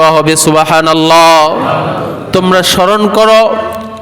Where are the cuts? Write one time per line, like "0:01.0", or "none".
0:02.1